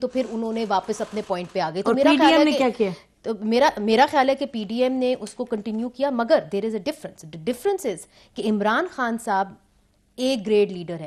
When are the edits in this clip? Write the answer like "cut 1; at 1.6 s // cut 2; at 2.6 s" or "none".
none